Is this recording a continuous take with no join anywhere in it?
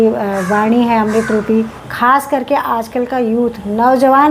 no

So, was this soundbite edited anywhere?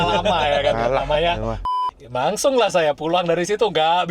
yes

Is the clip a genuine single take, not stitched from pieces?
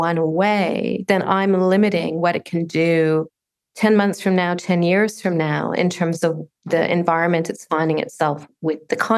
yes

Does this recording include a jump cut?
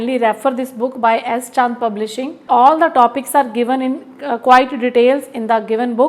yes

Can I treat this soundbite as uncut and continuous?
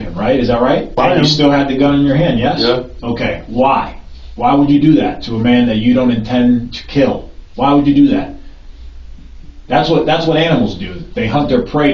no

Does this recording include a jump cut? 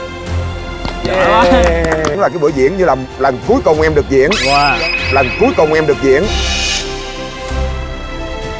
yes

